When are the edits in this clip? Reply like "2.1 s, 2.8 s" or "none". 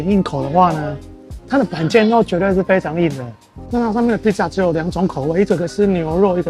3.6 s